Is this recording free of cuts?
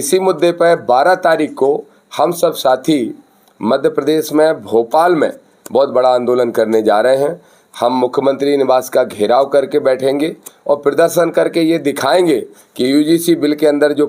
yes; 0 cuts

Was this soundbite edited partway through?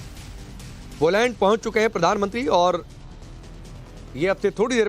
yes; 1 cut; at 1.0 s

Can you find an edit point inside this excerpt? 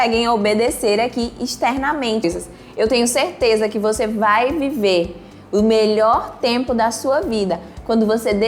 yes; 1 cut; at 2.2 s

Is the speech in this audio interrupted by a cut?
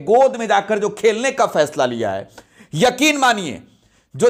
no; 0 cuts

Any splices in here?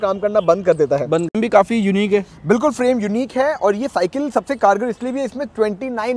yes; 1 cut; at 1.3 s

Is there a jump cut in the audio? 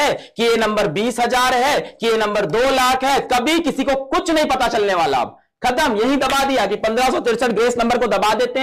no; 0 cuts

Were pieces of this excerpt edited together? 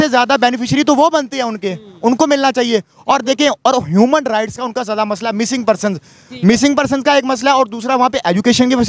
no; 0 cuts

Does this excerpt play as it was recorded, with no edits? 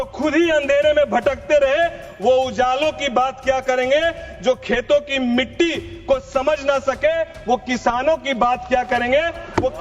yes; 0 cuts

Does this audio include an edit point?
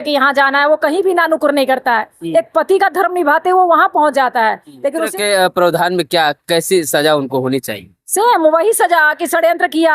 yes; 1 cut; at 5.1 s

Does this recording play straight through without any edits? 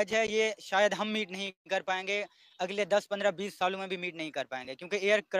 yes; 0 cuts

